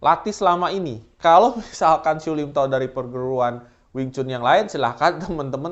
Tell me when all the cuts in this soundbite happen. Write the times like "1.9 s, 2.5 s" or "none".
none

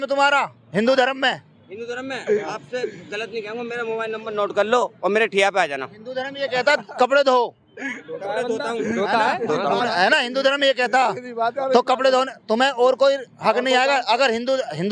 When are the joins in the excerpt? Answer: none

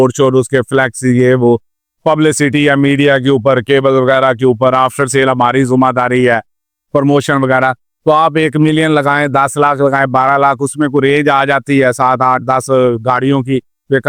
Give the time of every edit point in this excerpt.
none

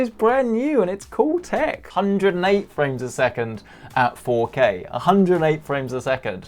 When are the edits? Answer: 1.9 s

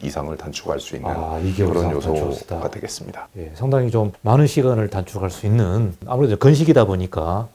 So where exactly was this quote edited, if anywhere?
none

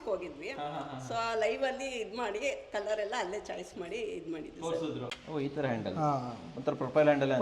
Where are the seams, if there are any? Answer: 5.1 s

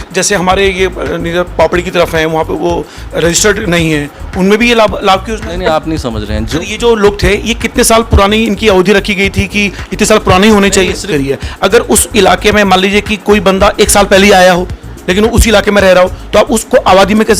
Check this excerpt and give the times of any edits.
6.5 s, 11.1 s

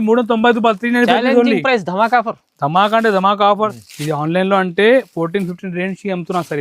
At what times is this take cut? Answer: 3.7 s

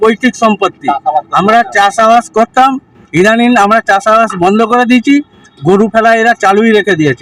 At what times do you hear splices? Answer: none

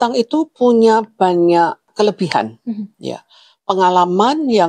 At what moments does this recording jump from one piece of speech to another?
1.9 s

